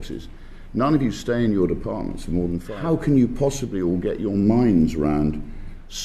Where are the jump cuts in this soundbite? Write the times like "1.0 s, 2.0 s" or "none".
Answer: 2.7 s